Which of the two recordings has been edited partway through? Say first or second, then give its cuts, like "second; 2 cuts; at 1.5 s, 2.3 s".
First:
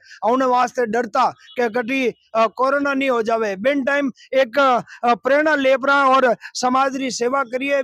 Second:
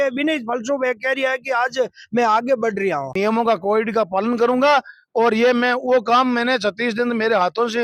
second; 1 cut; at 3.1 s